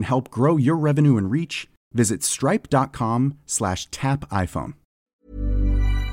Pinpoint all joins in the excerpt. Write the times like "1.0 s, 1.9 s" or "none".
5.0 s